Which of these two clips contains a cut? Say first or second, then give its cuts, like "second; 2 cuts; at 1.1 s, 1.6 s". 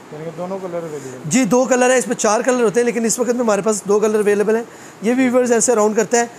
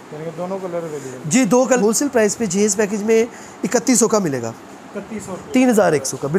second; 1 cut; at 1.8 s